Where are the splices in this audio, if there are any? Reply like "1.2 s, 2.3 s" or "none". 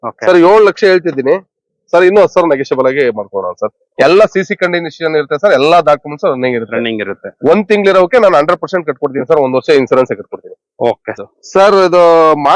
11.3 s